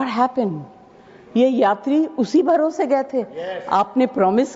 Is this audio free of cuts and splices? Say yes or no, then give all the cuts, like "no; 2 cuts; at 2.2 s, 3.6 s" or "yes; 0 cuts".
yes; 0 cuts